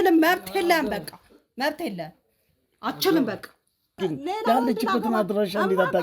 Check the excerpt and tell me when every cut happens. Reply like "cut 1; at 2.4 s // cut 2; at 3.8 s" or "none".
cut 1; at 4.0 s